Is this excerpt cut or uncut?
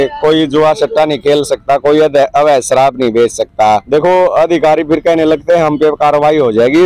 cut